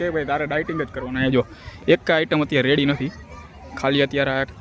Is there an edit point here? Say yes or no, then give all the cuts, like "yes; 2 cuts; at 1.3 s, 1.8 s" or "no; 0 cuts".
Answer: no; 0 cuts